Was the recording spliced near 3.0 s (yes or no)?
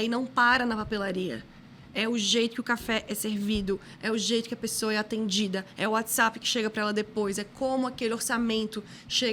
no